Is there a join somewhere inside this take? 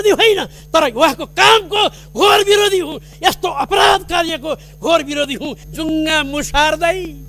yes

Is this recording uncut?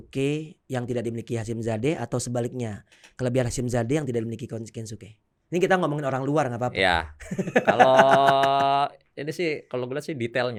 yes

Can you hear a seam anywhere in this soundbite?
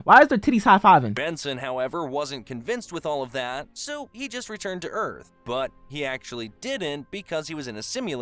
yes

